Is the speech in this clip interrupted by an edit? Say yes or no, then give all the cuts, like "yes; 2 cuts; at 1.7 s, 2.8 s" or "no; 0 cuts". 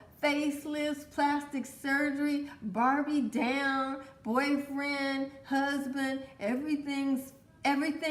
no; 0 cuts